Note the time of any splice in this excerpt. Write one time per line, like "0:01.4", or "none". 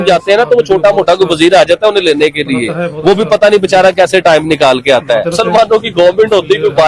0:05.4